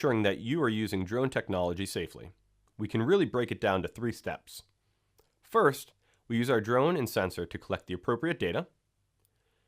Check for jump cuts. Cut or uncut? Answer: cut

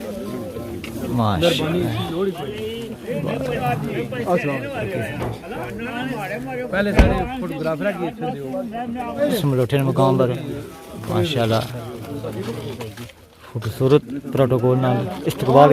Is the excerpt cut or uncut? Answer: cut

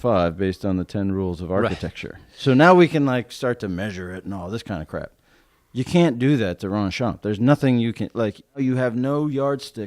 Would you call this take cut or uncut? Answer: cut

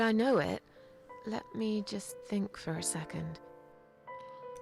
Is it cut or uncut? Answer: cut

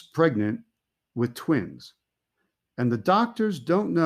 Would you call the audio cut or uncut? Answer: cut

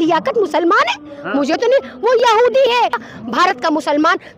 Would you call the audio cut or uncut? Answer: cut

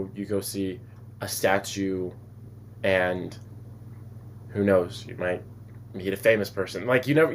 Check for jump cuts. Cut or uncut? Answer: uncut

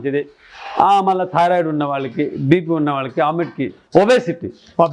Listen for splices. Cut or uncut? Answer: cut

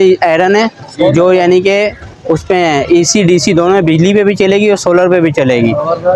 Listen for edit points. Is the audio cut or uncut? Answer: uncut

